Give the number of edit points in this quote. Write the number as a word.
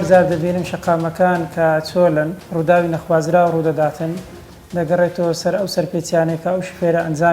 one